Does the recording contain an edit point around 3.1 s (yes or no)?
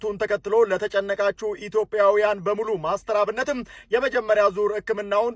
no